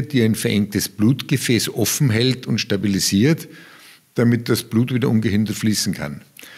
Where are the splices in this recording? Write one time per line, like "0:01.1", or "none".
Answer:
none